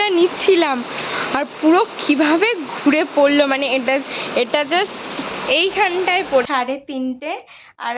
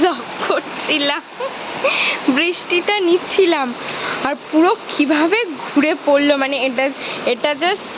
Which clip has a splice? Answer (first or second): first